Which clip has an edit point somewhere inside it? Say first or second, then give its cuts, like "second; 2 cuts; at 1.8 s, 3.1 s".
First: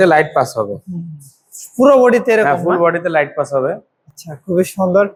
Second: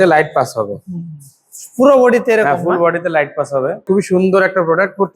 second; 1 cut; at 3.9 s